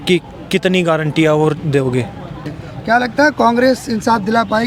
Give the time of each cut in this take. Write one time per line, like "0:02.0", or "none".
none

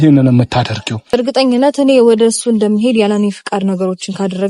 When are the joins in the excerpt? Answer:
0:01.2

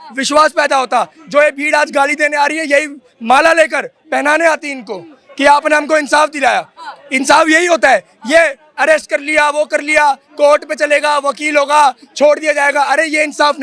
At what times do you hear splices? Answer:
none

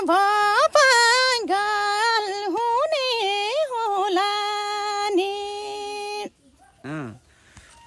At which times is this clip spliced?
0:06.6

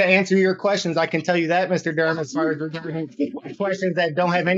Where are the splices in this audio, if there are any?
none

